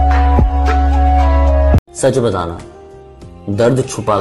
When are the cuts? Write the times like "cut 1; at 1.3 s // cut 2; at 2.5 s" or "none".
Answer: cut 1; at 1.8 s